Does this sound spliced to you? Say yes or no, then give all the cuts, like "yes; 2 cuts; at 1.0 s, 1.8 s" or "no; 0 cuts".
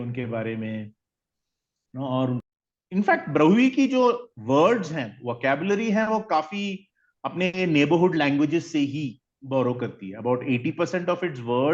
yes; 1 cut; at 2.4 s